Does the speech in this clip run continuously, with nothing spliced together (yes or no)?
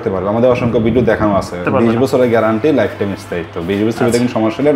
no